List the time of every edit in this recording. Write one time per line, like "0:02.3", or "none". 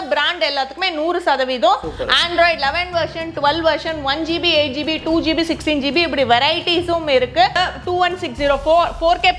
0:07.6